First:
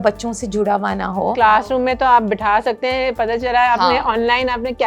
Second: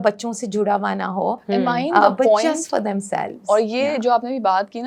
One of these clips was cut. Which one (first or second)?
first